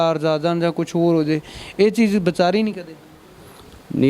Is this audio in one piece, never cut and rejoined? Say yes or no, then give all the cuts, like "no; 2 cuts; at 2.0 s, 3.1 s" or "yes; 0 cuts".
yes; 0 cuts